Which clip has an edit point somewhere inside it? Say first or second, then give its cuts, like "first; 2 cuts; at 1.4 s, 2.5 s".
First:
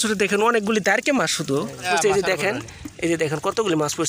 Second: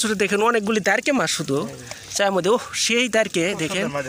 first; 1 cut; at 1.8 s